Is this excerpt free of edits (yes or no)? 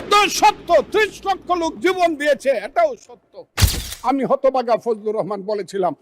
no